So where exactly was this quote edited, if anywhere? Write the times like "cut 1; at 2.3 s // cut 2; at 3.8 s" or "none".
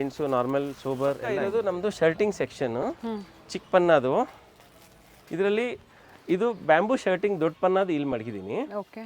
cut 1; at 1.4 s